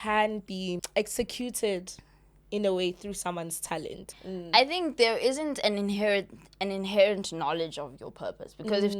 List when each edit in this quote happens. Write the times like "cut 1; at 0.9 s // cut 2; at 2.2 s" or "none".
cut 1; at 0.8 s // cut 2; at 4.1 s